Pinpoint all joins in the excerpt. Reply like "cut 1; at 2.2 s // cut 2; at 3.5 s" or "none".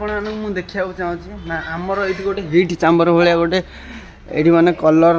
none